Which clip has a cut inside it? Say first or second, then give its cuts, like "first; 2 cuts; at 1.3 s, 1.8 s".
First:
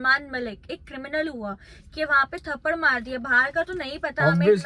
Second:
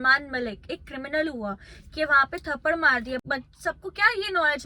second; 1 cut; at 3.2 s